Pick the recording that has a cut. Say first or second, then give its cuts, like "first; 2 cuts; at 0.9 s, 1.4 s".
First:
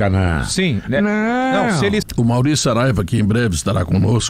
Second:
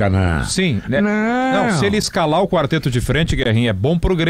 first; 1 cut; at 2.1 s